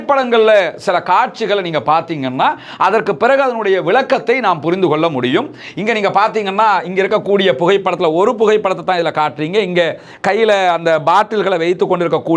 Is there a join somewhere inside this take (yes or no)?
no